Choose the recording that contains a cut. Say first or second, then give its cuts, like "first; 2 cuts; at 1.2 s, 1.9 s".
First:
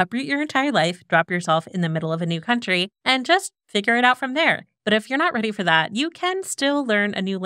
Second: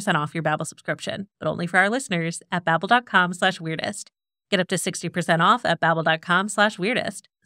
first; 1 cut; at 4.7 s